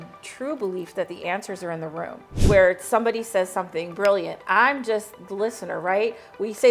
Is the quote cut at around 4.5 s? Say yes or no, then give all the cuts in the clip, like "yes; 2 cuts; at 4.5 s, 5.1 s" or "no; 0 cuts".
no; 1 cut; at 2.4 s